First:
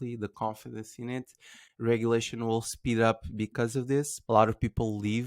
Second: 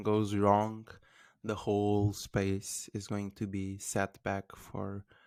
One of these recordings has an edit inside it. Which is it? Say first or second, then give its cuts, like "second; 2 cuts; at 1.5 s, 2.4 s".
first; 1 cut; at 4.2 s